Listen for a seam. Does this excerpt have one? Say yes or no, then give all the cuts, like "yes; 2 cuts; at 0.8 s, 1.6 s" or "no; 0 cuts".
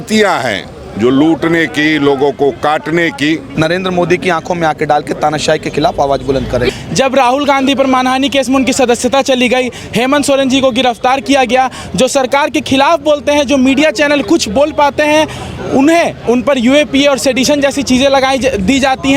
yes; 2 cuts; at 3.5 s, 6.7 s